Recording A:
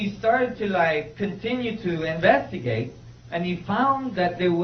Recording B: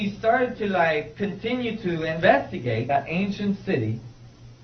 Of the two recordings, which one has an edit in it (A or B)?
A